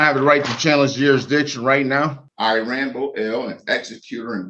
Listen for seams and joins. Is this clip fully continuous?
no; 1 cut; at 2.2 s

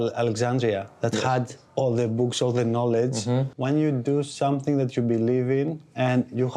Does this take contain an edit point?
yes; 1 cut; at 3.5 s

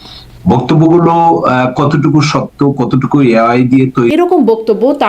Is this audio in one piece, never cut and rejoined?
no; 1 cut; at 4.1 s

